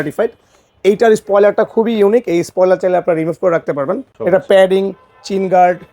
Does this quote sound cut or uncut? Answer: cut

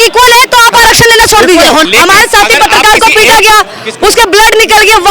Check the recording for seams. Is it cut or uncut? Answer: cut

